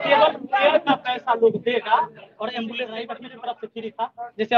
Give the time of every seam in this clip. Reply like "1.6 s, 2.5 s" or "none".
3.1 s